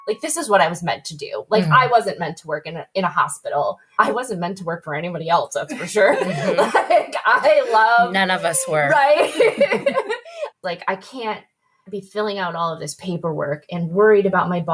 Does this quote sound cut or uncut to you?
cut